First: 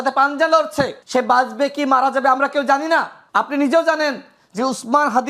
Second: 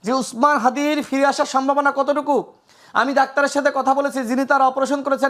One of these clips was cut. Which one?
first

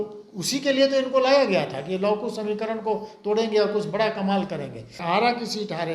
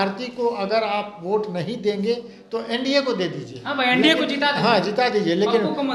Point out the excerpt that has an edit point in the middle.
first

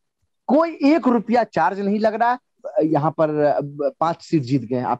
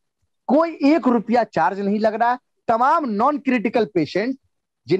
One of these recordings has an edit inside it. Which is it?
first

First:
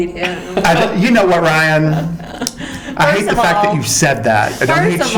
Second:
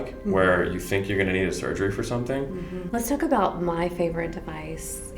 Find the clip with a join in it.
second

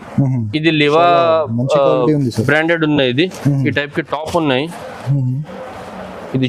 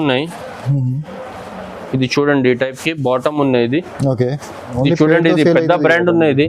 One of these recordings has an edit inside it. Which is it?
second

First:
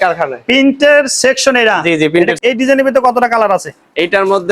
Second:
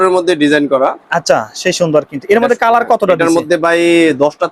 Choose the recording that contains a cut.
first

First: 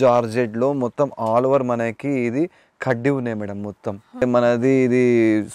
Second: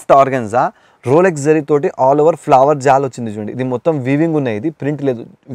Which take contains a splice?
first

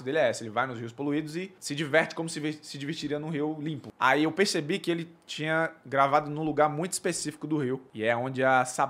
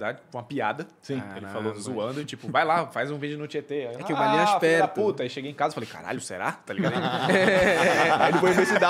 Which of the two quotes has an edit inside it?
first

